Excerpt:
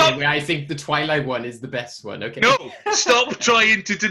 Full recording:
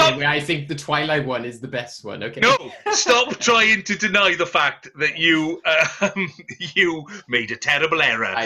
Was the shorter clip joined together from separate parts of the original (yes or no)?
no